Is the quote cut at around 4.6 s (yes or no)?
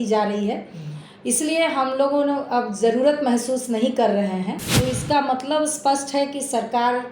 yes